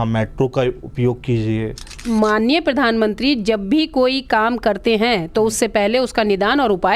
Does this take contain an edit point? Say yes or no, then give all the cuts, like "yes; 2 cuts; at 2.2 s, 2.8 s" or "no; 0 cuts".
yes; 1 cut; at 2.0 s